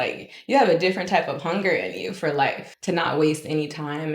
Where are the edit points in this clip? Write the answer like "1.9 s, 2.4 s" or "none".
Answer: 2.7 s